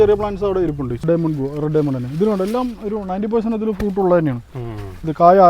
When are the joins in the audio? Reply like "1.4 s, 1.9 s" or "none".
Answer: 1.0 s